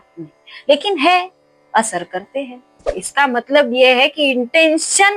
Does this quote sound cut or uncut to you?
cut